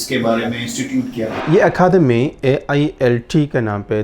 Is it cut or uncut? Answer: uncut